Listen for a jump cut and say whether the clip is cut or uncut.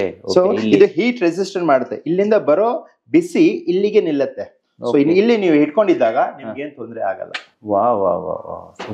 uncut